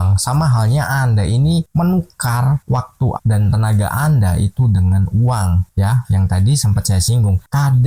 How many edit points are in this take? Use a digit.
0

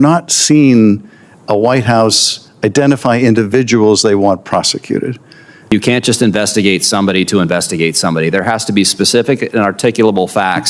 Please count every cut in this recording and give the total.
1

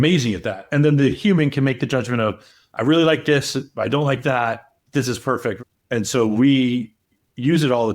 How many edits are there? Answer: 1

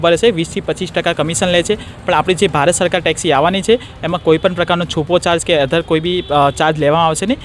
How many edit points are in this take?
0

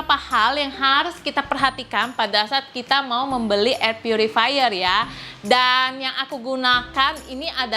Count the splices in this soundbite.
0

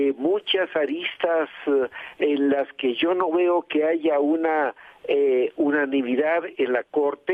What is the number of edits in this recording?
0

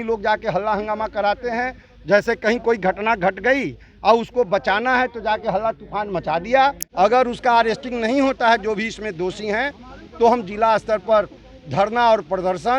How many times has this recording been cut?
1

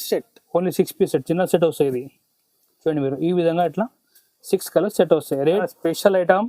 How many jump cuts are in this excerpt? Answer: 1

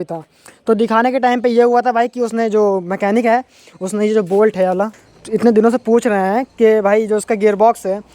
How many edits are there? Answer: 1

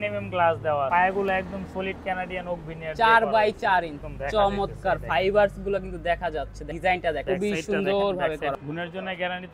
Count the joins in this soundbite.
5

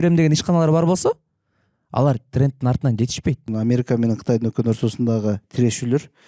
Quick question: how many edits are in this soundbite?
1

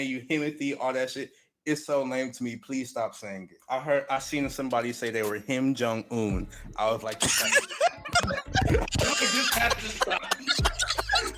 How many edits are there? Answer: 1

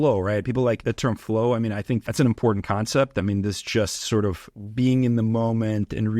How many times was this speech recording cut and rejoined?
2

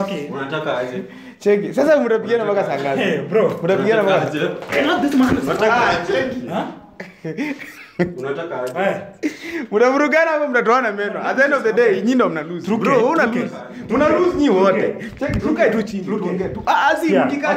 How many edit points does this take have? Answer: 0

